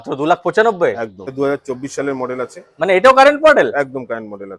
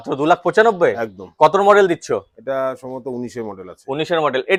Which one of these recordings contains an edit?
first; 1 cut; at 1.3 s

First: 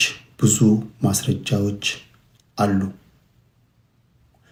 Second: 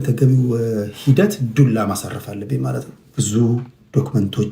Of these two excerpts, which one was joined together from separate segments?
second; 1 cut; at 3.0 s

